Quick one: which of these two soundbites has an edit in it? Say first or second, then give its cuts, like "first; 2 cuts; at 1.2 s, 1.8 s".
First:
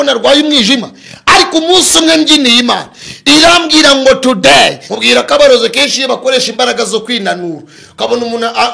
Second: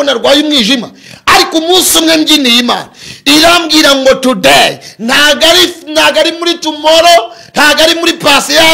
first; 1 cut; at 4.8 s